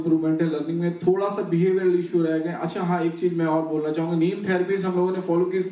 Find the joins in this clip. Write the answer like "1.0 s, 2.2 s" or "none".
none